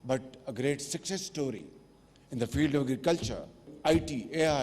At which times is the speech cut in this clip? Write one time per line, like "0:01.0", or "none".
0:03.7